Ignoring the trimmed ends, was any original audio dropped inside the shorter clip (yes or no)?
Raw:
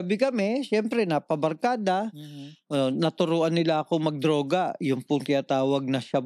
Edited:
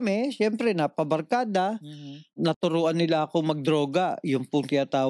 yes